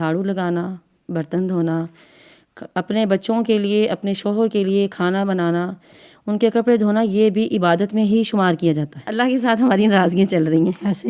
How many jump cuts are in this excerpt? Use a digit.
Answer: 1